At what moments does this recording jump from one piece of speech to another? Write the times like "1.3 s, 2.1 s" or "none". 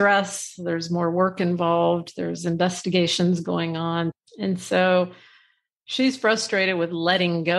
4.2 s

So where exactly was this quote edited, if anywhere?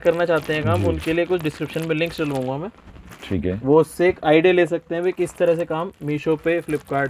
none

